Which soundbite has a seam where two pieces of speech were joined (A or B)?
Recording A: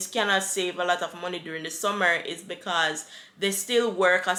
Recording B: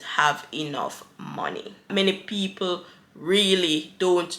B